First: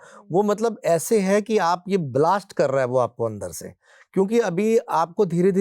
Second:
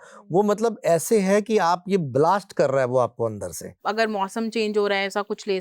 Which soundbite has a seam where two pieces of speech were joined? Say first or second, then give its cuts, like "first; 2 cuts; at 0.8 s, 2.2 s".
second; 1 cut; at 3.8 s